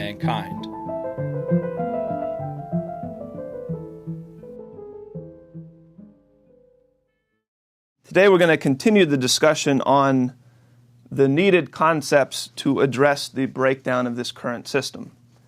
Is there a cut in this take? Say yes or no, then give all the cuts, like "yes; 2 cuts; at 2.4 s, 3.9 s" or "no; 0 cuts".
yes; 1 cut; at 4.2 s